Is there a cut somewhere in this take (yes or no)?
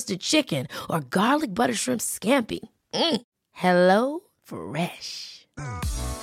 no